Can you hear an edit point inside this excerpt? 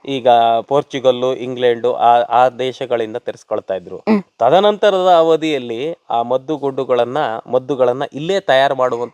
no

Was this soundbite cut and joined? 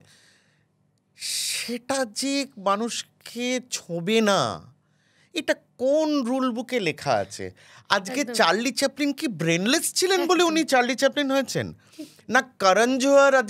no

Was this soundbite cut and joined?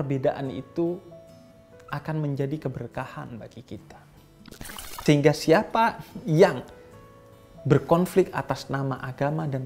yes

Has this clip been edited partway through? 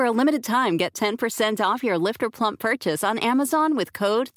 no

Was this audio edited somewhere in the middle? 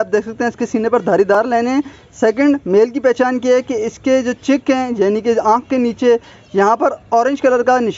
no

